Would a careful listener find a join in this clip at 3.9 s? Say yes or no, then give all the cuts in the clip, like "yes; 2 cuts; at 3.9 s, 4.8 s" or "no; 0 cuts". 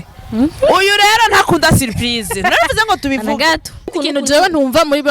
yes; 1 cut; at 3.9 s